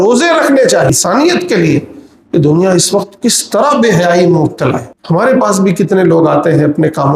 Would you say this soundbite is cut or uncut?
cut